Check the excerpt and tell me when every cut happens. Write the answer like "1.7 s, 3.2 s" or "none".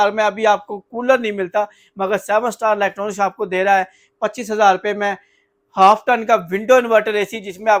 none